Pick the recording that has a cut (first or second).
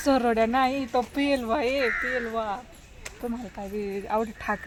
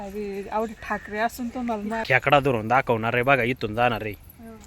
second